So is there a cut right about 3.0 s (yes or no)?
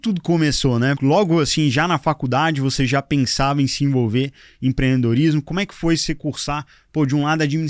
no